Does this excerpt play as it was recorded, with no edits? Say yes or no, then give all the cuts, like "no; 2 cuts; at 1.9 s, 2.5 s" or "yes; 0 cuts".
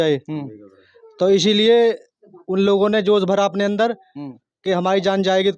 yes; 0 cuts